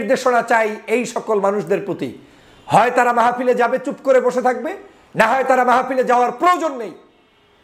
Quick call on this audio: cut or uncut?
uncut